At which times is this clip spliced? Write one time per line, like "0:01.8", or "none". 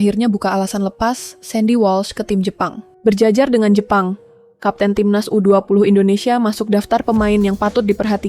0:02.9